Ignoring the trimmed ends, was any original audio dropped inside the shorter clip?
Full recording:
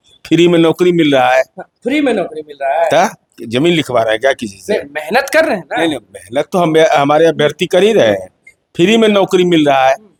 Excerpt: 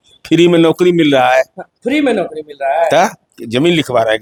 no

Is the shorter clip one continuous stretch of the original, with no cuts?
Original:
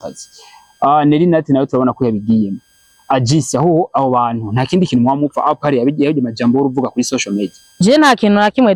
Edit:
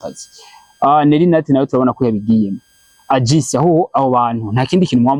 yes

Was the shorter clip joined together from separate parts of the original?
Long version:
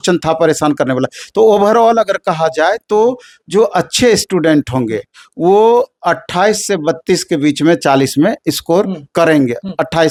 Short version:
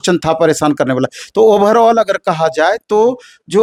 no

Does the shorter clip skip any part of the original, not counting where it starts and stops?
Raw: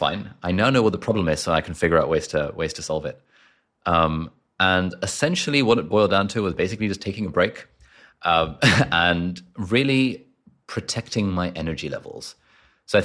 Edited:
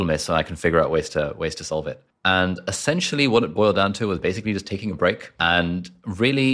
yes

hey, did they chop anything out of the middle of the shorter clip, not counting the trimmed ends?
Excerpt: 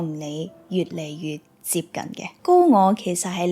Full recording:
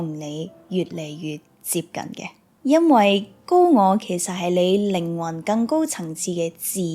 yes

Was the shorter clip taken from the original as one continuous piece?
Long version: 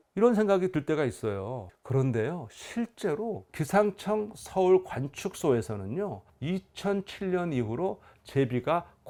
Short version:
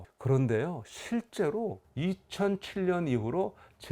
no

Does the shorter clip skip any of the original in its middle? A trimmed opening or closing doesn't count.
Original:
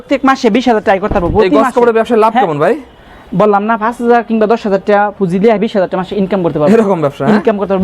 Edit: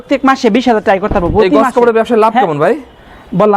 no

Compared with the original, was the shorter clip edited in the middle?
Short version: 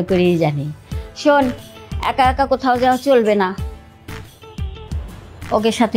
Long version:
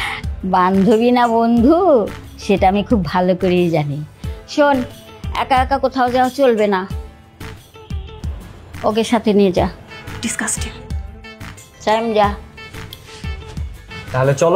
no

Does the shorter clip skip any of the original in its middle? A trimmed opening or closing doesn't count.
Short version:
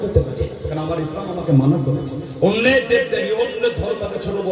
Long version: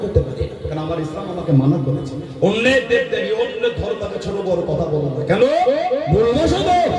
no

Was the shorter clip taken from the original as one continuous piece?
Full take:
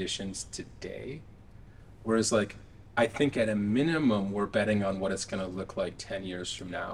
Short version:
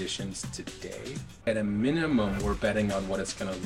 no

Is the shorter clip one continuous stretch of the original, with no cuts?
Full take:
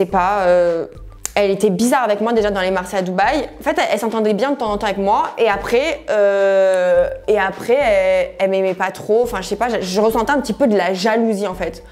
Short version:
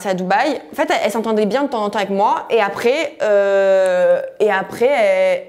yes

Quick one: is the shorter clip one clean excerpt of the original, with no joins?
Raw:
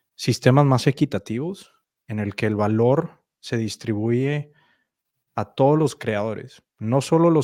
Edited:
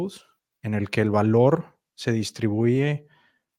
yes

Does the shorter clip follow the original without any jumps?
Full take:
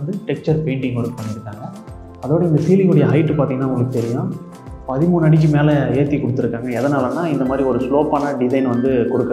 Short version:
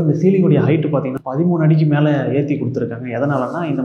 no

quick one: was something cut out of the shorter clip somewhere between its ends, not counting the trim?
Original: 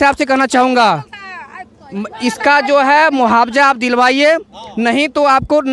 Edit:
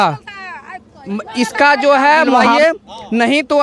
yes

